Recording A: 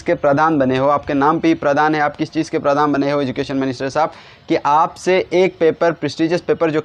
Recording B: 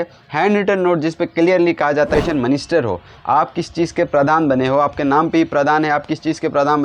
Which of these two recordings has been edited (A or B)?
B